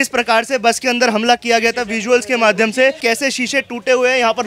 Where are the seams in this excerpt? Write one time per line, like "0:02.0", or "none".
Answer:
0:03.0